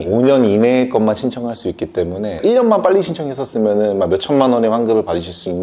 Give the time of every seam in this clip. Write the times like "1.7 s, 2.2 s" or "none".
none